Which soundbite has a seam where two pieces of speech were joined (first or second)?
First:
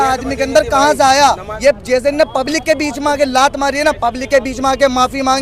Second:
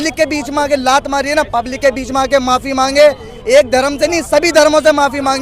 first